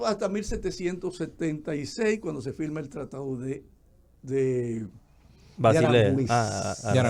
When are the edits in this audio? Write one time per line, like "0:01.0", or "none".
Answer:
none